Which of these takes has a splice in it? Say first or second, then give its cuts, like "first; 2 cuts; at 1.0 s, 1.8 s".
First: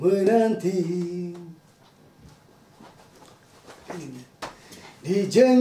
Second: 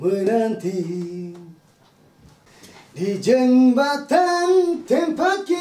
second; 1 cut; at 2.6 s